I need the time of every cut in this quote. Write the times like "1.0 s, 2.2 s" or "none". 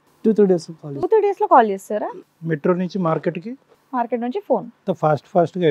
4.8 s